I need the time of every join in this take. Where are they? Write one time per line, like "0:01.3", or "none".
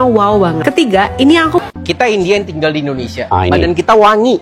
0:01.6